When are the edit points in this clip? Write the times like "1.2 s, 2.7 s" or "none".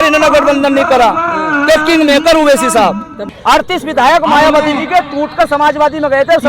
3.2 s